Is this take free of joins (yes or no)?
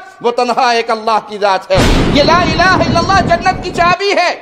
no